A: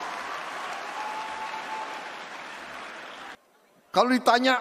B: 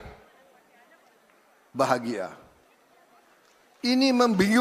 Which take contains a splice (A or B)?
A